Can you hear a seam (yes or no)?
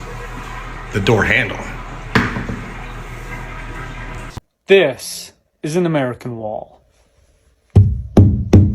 yes